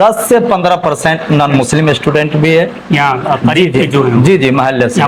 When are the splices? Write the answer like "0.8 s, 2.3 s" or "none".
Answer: none